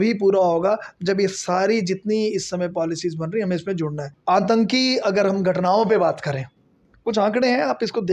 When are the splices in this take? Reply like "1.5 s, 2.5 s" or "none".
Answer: 4.1 s